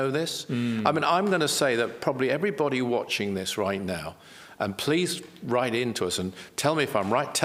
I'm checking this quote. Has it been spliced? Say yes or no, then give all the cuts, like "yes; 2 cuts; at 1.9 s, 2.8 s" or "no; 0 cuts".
no; 0 cuts